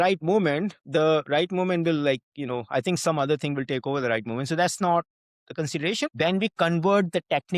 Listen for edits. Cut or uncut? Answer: cut